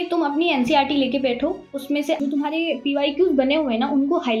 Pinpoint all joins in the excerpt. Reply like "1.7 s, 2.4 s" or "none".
none